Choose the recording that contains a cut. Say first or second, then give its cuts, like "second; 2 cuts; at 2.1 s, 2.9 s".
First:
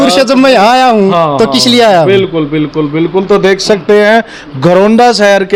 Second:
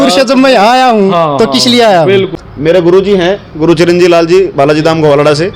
second; 1 cut; at 2.4 s